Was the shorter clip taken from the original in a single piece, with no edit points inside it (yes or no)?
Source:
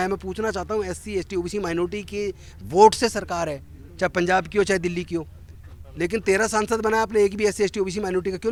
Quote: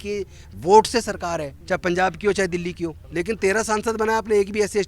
no